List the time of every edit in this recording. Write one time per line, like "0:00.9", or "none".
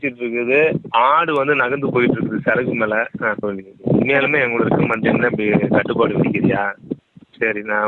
0:03.4
0:06.9